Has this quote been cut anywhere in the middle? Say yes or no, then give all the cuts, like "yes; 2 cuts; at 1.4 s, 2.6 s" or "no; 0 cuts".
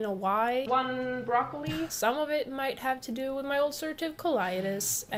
no; 0 cuts